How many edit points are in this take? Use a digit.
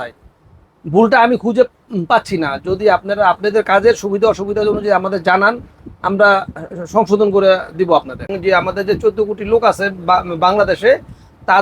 1